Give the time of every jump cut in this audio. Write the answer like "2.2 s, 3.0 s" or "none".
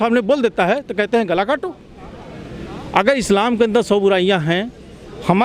none

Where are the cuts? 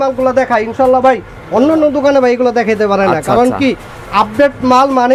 none

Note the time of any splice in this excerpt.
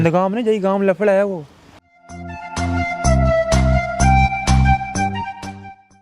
none

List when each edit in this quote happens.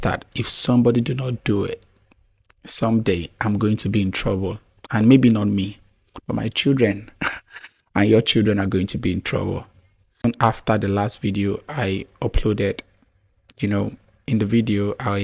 10.2 s

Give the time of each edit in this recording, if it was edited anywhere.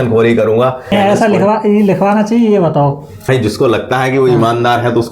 0.9 s, 3.3 s

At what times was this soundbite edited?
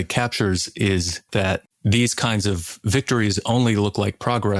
1.4 s

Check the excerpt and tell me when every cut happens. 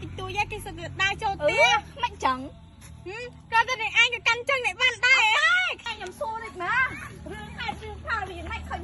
5.8 s

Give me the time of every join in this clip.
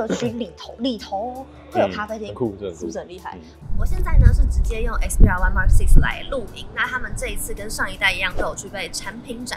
3.6 s

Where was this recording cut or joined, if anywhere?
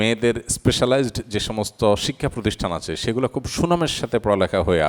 none

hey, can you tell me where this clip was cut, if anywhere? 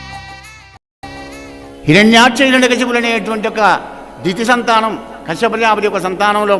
1.0 s

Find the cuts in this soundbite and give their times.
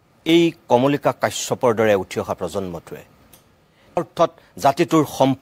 4.0 s

